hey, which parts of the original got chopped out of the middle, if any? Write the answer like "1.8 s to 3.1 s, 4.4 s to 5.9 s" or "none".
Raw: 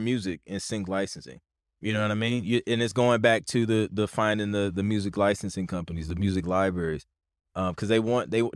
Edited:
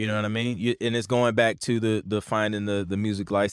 none